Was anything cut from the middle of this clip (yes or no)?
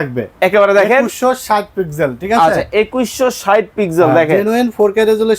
no